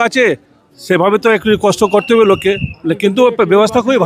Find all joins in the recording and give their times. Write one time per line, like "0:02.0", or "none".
none